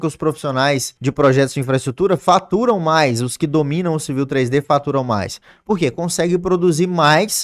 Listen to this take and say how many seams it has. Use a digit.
1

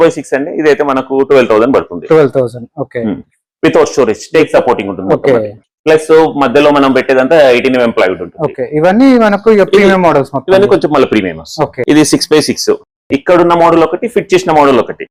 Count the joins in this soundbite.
0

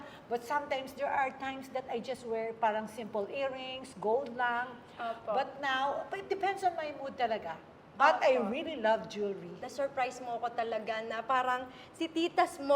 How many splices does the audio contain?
1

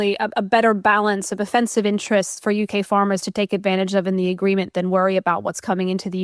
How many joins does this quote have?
1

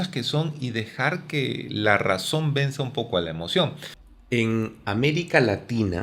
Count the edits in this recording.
1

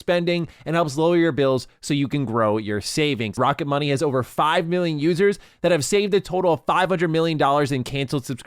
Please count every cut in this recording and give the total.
1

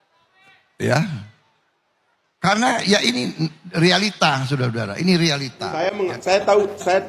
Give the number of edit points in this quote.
1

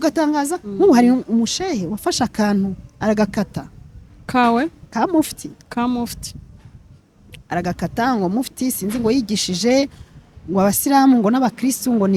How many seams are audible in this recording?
0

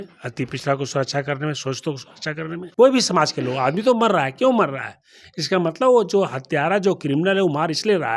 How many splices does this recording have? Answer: 1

